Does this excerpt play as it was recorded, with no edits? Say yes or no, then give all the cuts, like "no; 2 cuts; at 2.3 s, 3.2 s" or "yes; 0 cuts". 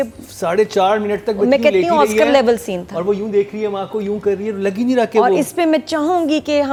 yes; 0 cuts